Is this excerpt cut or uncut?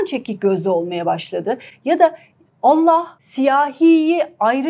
cut